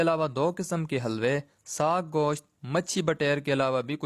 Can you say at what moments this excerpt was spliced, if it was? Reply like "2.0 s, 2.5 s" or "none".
none